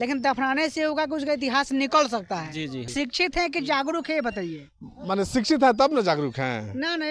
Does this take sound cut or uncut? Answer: cut